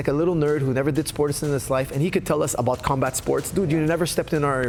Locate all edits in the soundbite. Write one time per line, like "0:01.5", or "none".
none